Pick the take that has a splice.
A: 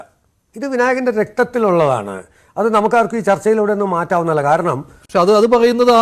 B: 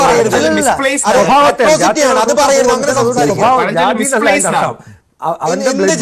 A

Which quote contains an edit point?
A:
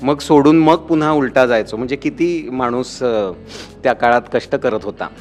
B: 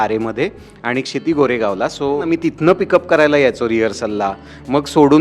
B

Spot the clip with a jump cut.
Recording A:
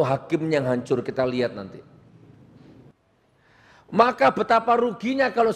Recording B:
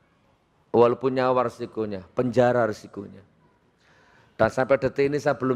A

